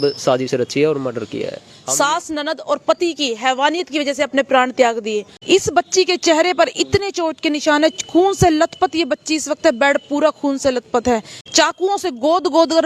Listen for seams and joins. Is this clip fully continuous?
no; 3 cuts; at 1.7 s, 5.3 s, 11.4 s

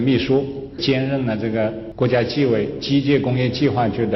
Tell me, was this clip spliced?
yes; 2 cuts; at 0.8 s, 1.8 s

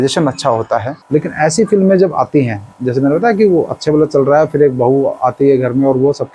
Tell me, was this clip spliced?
yes; 1 cut; at 0.9 s

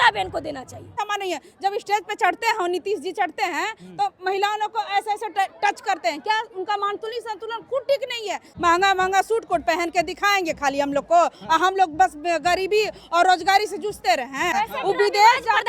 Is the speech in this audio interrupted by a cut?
yes; 3 cuts; at 1.0 s, 8.5 s, 14.5 s

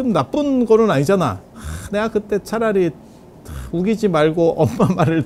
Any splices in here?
no; 0 cuts

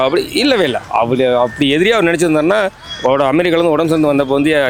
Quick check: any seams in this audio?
no; 0 cuts

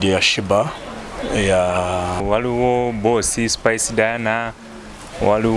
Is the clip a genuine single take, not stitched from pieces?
no; 1 cut; at 2.2 s

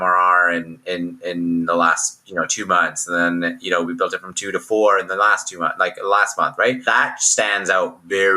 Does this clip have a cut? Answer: yes; 1 cut; at 6.8 s

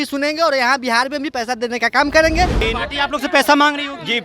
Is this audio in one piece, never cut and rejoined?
no; 1 cut; at 2.6 s

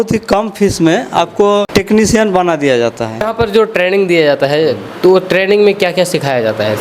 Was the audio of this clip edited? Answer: yes; 2 cuts; at 1.7 s, 3.3 s

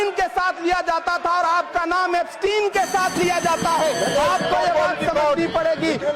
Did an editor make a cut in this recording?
no; 0 cuts

